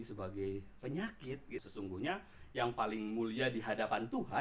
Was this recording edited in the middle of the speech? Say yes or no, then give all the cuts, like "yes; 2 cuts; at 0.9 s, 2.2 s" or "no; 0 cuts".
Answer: yes; 1 cut; at 1.6 s